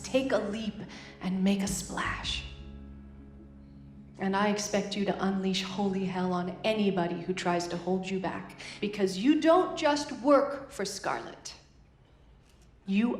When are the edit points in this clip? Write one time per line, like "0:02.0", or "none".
0:03.9